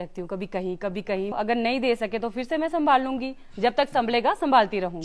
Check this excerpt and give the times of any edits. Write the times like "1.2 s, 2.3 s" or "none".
1.3 s